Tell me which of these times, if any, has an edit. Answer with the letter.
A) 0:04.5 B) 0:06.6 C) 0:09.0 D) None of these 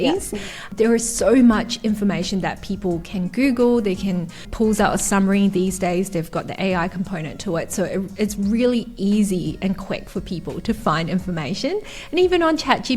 A